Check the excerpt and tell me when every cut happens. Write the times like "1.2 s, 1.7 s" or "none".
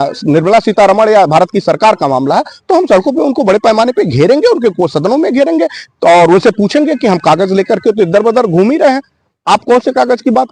none